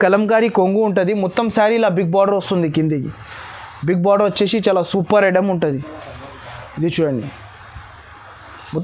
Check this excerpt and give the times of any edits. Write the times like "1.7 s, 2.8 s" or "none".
none